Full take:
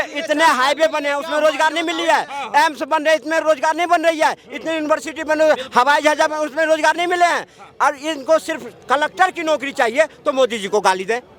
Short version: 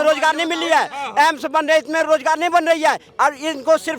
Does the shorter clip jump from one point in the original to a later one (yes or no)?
yes